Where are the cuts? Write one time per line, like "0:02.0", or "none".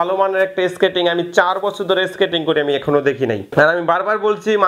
0:03.4